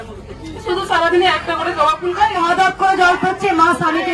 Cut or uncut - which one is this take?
cut